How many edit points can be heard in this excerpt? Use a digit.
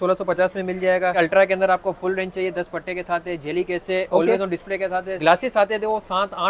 2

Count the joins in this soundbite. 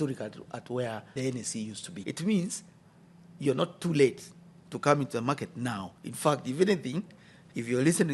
1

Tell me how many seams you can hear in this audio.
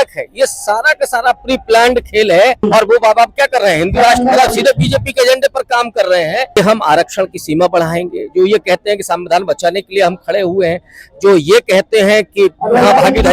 2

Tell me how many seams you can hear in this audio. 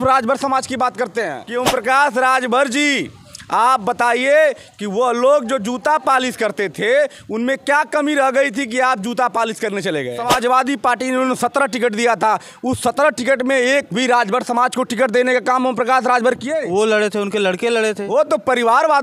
2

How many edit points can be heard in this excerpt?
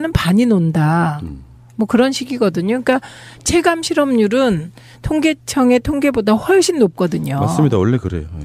1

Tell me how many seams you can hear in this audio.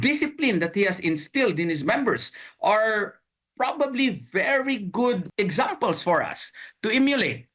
1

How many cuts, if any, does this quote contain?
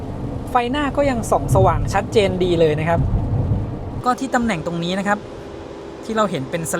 1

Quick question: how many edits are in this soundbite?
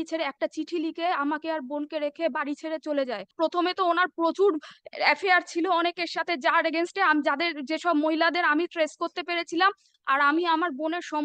2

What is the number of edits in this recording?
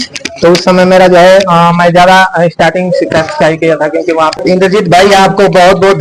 1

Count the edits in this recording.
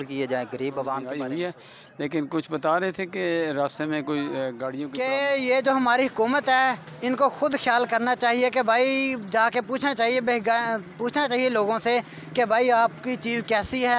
2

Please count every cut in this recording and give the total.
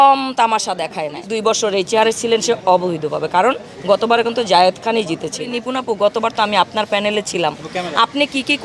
2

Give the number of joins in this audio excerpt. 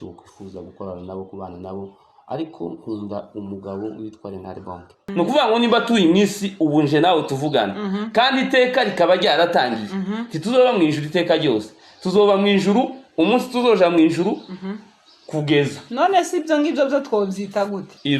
1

